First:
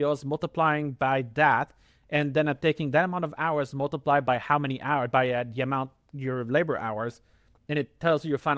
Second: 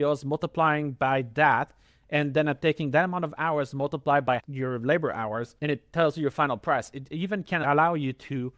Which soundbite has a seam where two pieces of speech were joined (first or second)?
second